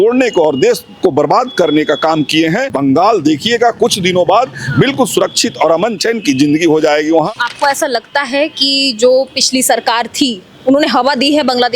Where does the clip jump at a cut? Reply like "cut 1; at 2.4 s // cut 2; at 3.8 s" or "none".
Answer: cut 1; at 2.7 s // cut 2; at 6.0 s // cut 3; at 7.3 s